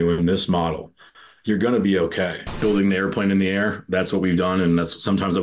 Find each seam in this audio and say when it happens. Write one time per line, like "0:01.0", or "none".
0:02.5